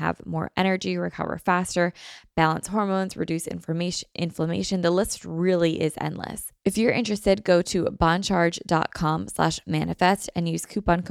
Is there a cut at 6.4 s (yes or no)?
yes